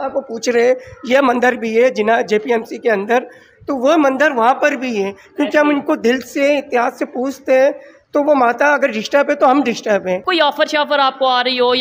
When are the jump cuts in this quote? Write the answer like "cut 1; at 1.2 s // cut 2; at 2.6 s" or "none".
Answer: cut 1; at 10.2 s